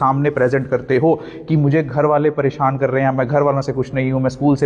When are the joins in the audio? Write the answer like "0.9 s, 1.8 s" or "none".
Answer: none